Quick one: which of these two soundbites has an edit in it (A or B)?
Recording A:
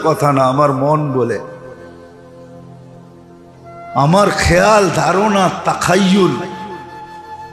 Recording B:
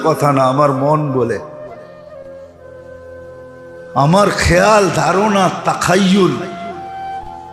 A